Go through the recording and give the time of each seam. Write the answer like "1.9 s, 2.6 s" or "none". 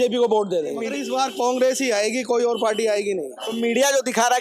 0.9 s

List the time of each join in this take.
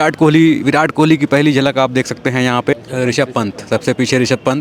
2.7 s

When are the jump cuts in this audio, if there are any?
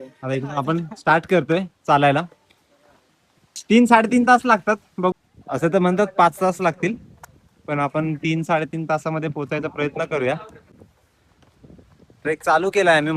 5.1 s

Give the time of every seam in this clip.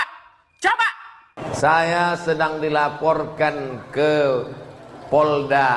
1.3 s

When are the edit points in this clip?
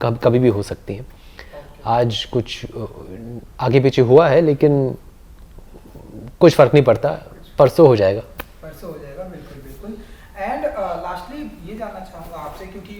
none

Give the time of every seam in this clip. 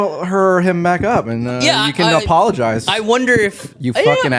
none

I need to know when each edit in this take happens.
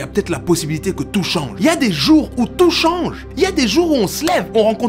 1.5 s, 3.2 s

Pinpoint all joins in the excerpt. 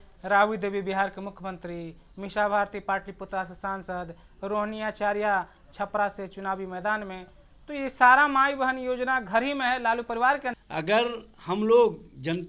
10.5 s

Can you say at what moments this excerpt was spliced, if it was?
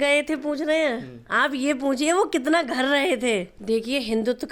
3.5 s

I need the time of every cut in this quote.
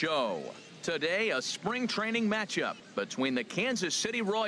2.8 s

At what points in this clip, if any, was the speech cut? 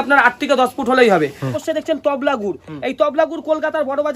1.5 s

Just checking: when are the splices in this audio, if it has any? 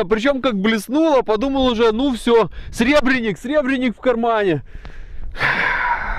none

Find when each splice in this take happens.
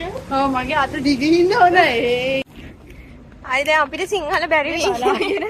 2.4 s

